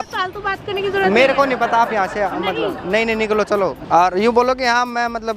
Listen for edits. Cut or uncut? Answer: cut